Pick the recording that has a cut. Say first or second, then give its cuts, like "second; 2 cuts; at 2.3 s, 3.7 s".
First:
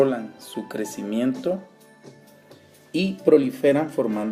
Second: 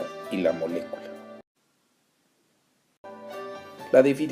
second; 1 cut; at 2.6 s